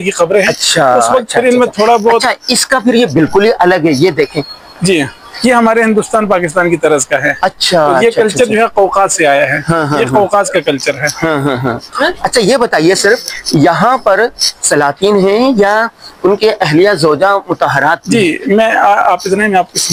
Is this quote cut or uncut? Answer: uncut